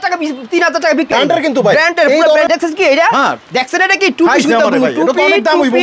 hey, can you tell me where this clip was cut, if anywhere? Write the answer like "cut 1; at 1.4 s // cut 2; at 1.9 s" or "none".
cut 1; at 1.2 s // cut 2; at 2.5 s